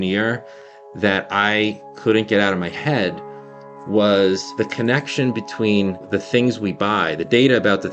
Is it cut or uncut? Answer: cut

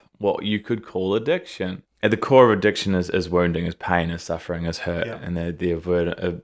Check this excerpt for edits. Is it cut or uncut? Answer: cut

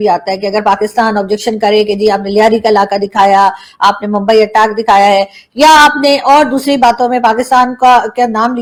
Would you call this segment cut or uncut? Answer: uncut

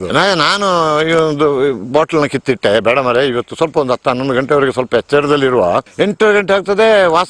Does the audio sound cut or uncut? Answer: cut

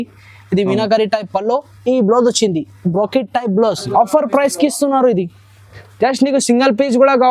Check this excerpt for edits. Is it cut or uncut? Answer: cut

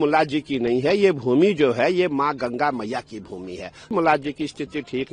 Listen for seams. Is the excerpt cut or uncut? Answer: cut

